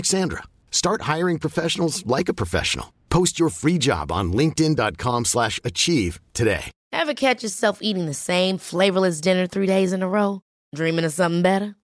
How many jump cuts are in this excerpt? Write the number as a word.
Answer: one